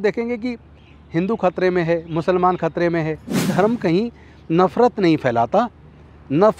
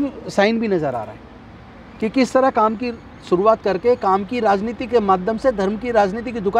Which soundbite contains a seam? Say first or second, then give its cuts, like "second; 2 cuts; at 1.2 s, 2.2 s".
first; 1 cut; at 3.5 s